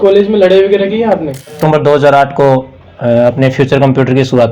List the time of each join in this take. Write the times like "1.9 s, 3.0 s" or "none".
1.6 s